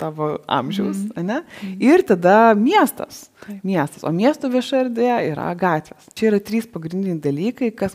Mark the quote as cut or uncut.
cut